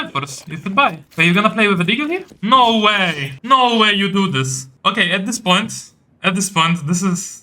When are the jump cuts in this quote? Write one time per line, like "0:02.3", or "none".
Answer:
0:01.1
0:02.3
0:03.3
0:04.6